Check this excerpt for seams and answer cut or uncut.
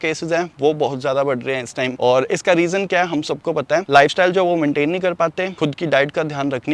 uncut